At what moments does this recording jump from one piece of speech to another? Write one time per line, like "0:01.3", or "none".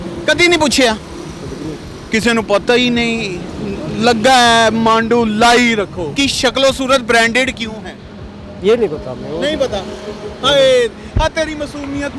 0:06.1